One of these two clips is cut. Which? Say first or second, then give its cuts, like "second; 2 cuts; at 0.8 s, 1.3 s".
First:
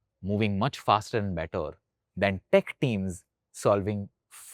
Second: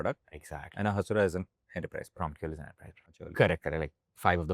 second; 1 cut; at 3.2 s